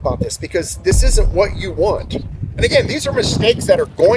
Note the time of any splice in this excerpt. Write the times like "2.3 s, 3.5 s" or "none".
2.4 s